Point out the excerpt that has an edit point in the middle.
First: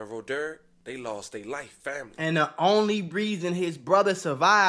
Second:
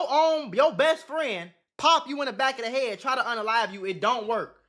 first; 1 cut; at 1.7 s

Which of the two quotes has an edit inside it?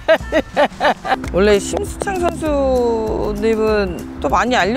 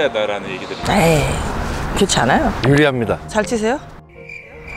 first; 1 cut; at 1.2 s

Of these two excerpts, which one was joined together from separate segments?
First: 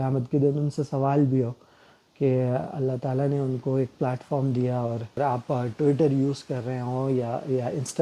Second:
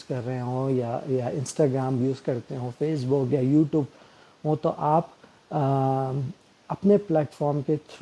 first; 1 cut; at 5.2 s

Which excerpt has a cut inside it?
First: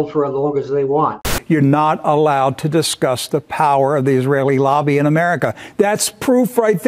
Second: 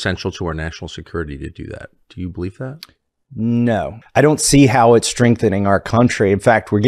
first; 1 cut; at 1.3 s

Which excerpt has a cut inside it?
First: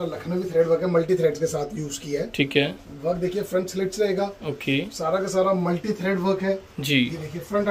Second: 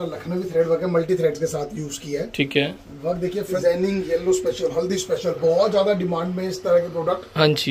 second; 1 cut; at 3.6 s

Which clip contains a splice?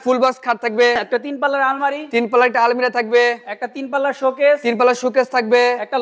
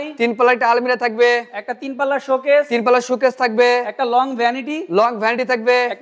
first; 1 cut; at 1.0 s

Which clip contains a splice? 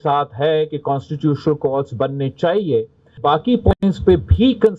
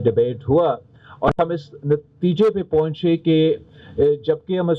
first; 1 cut; at 3.2 s

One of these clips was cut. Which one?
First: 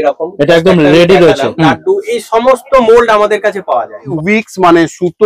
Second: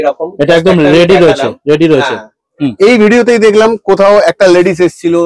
first; 2 cuts; at 1.5 s, 4.1 s

